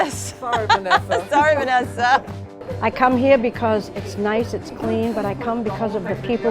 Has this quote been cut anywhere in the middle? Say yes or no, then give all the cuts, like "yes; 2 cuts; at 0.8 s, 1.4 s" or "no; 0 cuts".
yes; 1 cut; at 2.3 s